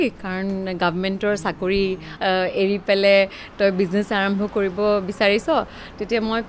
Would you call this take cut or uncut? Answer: cut